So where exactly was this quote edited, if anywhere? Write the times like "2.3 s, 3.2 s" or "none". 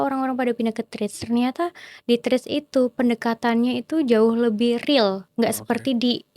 5.2 s